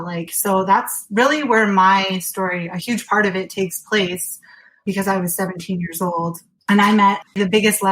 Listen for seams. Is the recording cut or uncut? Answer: cut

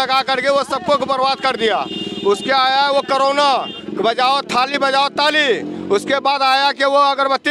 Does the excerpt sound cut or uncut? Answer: uncut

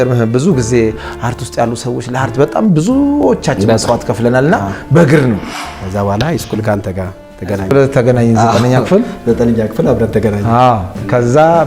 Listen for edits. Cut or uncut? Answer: cut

